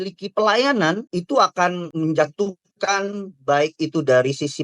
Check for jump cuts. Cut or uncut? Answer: cut